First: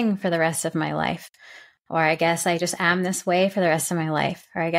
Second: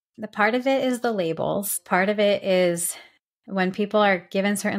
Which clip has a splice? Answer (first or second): second